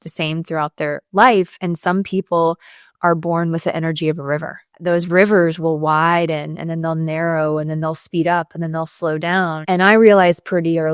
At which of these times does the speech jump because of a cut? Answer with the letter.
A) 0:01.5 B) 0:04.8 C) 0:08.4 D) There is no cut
B